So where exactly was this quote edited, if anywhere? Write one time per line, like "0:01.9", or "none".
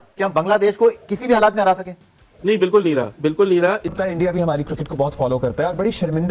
0:03.9

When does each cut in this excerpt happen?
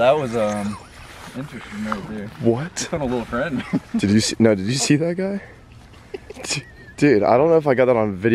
none

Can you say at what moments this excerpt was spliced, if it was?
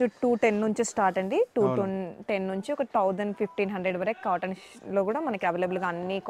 none

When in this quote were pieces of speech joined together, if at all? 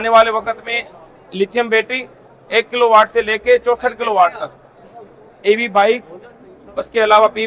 none

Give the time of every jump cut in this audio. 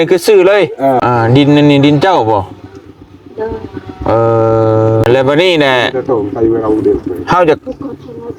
0:01.0
0:05.1

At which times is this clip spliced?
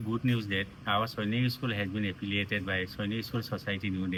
none

